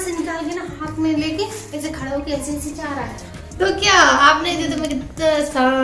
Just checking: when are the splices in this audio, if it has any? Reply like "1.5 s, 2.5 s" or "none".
3.4 s